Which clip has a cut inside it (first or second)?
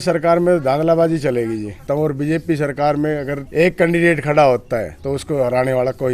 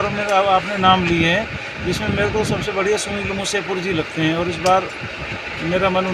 first